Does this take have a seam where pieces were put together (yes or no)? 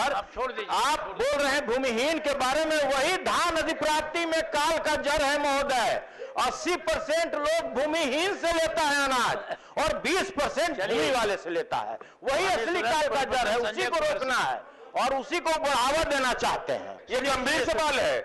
yes